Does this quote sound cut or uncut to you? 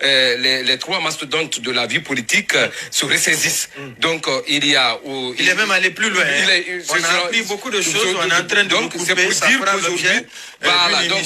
uncut